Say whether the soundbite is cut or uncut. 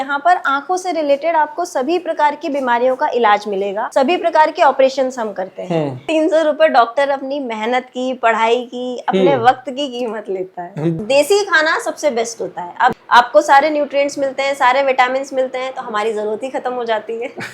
cut